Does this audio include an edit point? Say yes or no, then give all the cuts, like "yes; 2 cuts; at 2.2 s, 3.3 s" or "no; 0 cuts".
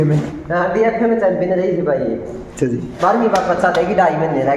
yes; 1 cut; at 2.9 s